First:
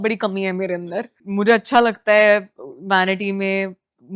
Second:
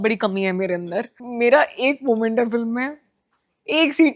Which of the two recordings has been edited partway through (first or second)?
second